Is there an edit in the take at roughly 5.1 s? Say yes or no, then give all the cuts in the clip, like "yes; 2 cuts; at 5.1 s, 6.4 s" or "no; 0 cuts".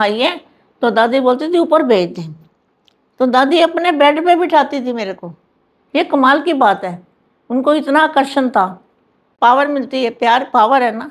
no; 1 cut; at 9.2 s